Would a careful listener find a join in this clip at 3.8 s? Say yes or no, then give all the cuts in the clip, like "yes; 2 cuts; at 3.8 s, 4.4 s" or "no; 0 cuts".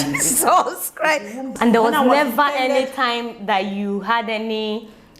no; 1 cut; at 1.5 s